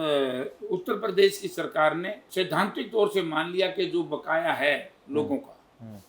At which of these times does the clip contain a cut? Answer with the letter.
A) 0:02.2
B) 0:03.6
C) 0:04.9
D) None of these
A